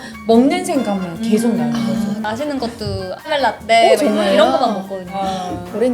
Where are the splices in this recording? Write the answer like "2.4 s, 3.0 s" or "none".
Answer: 2.2 s, 3.3 s